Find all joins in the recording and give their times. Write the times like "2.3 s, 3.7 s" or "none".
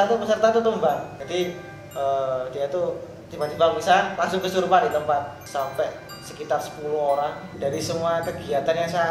1.2 s, 5.4 s, 7.5 s